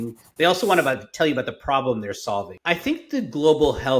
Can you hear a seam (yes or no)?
yes